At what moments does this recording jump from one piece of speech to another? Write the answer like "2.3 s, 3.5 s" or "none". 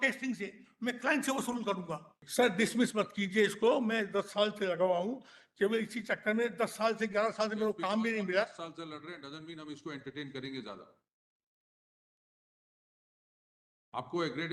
2.2 s